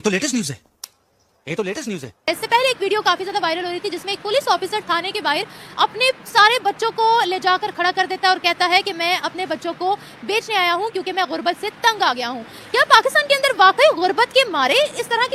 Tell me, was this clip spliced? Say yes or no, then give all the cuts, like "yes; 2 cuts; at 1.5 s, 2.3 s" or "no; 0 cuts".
no; 0 cuts